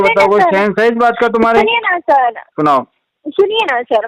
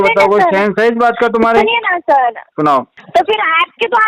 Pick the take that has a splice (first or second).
second